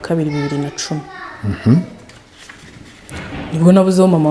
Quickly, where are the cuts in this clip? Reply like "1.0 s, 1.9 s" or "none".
none